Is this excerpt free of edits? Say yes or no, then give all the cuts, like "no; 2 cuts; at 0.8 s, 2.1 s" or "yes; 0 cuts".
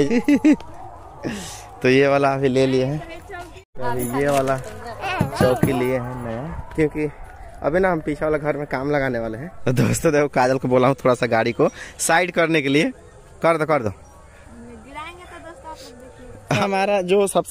no; 3 cuts; at 6.5 s, 9.5 s, 16.6 s